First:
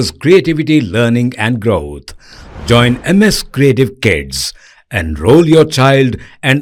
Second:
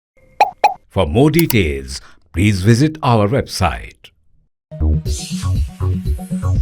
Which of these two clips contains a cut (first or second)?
second